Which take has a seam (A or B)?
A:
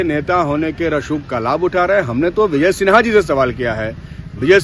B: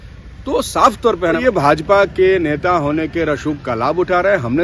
B